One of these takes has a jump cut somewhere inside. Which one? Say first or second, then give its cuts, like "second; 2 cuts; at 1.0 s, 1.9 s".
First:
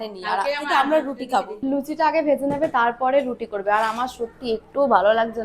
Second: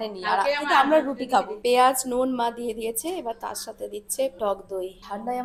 first; 1 cut; at 1.5 s